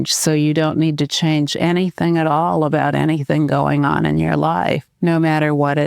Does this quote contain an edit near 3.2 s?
no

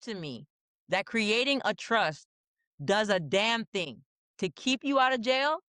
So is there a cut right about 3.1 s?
no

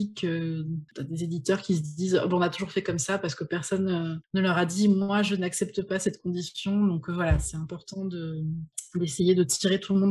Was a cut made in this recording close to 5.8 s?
no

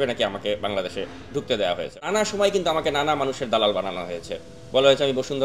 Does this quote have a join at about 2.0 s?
yes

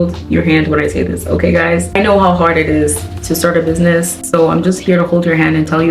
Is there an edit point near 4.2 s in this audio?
yes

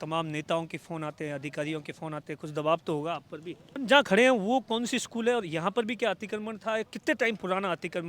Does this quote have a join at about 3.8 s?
yes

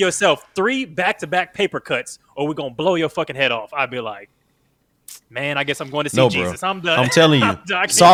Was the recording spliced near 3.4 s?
no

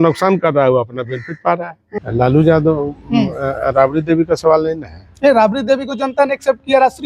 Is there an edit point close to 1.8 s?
yes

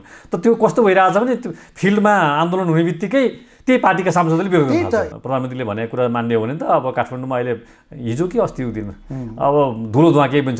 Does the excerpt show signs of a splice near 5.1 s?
yes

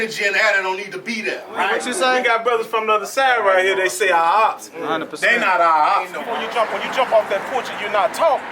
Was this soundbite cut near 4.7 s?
no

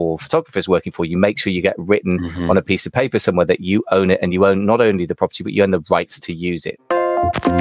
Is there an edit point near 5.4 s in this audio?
no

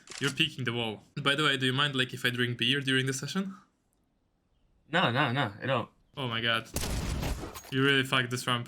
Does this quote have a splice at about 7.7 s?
no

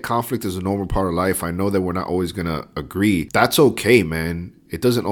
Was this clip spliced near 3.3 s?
yes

